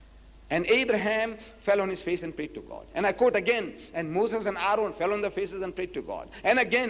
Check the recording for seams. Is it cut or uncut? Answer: cut